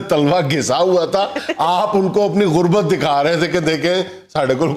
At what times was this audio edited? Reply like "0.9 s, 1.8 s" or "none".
none